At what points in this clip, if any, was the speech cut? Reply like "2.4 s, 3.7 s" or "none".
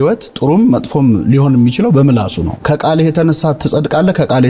2.5 s